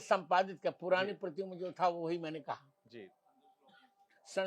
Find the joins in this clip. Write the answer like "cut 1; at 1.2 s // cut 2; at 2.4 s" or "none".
none